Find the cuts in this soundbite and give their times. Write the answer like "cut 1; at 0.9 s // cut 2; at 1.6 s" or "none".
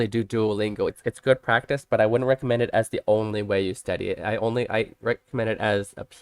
cut 1; at 0.9 s